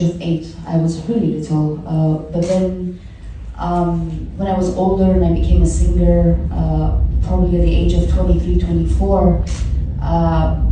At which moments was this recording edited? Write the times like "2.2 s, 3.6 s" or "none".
none